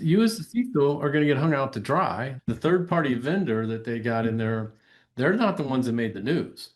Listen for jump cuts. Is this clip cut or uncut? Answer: cut